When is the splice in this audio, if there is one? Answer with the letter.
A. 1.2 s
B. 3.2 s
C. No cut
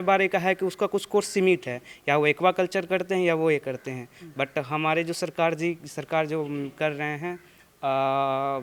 C